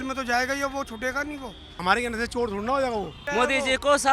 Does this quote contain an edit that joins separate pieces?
yes; 2 cuts; at 1.8 s, 3.2 s

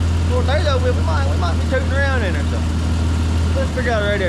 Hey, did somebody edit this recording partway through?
no; 0 cuts

